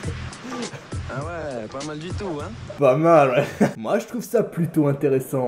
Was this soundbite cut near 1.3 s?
no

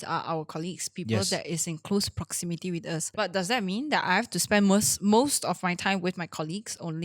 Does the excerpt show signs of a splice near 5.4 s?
no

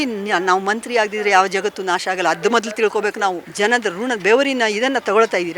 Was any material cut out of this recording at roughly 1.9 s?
no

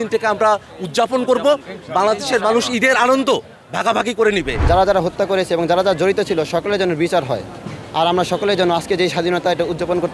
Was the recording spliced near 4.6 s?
yes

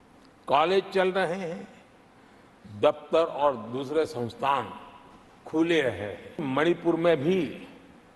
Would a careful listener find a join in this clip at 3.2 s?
no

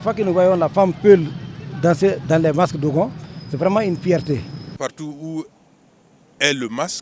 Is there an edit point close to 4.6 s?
yes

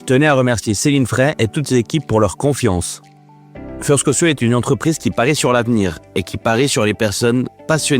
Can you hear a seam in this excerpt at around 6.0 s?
no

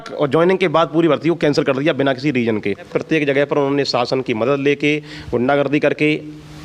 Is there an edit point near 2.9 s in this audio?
yes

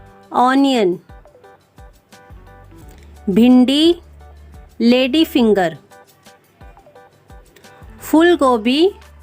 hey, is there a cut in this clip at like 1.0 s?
yes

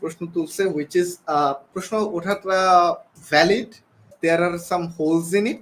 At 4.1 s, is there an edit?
yes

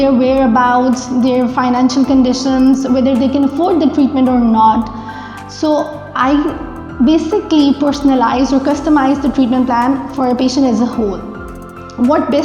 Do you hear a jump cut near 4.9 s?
no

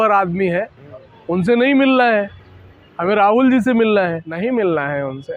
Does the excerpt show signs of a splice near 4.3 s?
yes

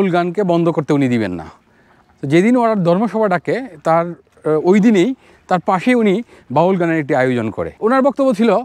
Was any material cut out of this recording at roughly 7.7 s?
yes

